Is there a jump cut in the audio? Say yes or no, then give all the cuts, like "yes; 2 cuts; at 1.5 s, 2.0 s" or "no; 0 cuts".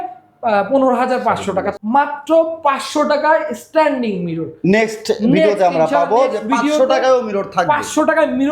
yes; 1 cut; at 1.7 s